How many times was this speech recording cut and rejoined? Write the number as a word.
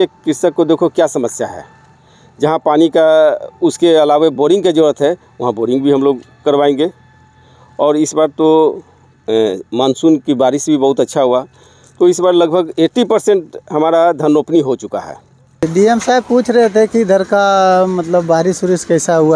one